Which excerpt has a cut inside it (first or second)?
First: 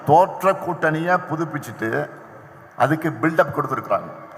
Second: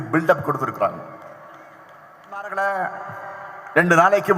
second